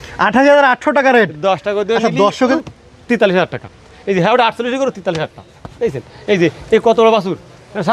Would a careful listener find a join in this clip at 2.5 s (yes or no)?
yes